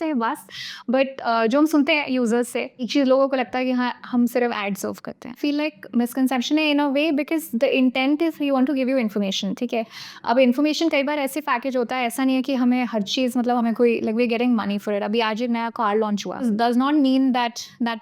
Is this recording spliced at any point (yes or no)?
yes